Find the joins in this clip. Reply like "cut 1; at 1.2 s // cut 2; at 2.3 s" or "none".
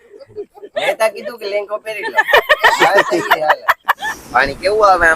cut 1; at 4.0 s